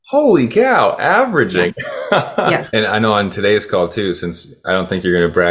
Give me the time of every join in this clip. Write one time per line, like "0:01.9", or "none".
0:02.7